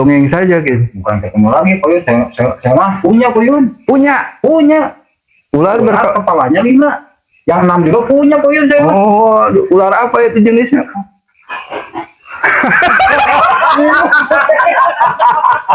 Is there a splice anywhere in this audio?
no; 0 cuts

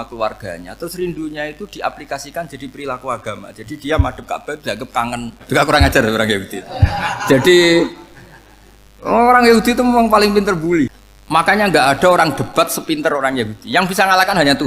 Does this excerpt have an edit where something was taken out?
yes; 2 cuts; at 5.4 s, 10.5 s

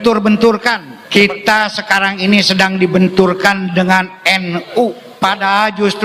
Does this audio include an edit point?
yes; 2 cuts; at 0.9 s, 5.0 s

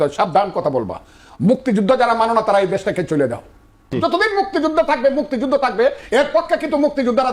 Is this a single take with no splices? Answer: no; 1 cut; at 3.9 s

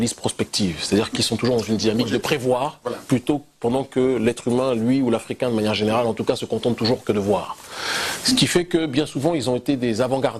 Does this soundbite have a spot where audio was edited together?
yes; 1 cut; at 4.4 s

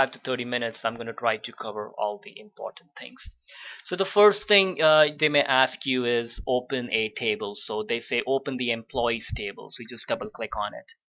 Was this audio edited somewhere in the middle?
yes; 1 cut; at 8.9 s

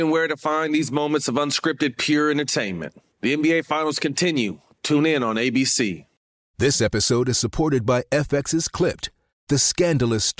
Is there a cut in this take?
yes; 1 cut; at 6.1 s

